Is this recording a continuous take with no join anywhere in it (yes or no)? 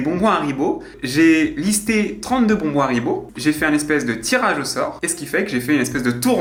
yes